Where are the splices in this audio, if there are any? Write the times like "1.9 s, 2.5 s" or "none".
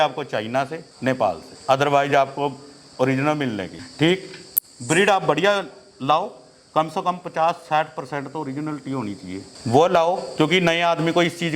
none